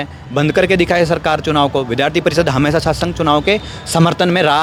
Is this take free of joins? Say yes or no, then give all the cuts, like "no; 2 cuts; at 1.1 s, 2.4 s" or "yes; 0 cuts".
yes; 0 cuts